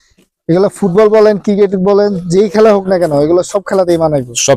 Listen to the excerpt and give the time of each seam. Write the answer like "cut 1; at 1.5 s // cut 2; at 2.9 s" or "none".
none